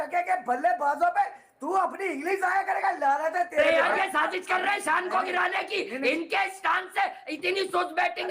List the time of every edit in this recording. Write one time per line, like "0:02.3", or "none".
0:03.6

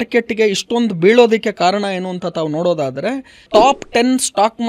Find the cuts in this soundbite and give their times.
0:03.5

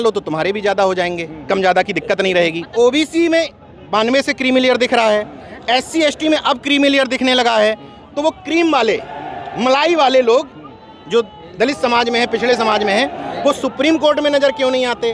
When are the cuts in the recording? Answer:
0:02.6

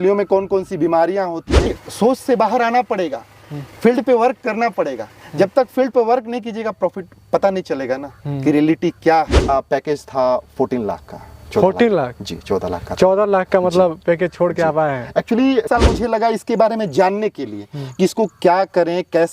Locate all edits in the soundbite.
0:01.8
0:09.5
0:15.7

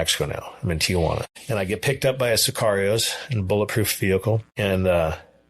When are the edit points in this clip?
0:01.3
0:04.5

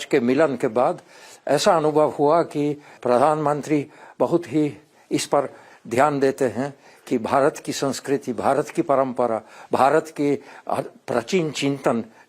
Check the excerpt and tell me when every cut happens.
0:02.9
0:04.9

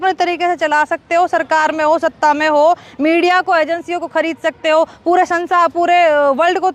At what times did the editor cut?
none

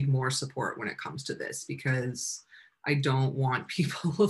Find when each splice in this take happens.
none

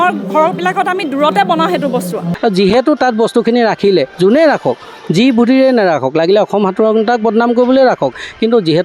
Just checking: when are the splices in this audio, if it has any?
0:02.3

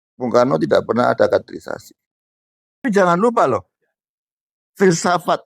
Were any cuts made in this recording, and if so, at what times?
0:02.8

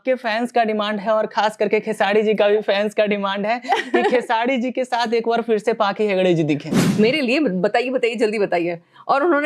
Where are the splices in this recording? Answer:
0:06.8

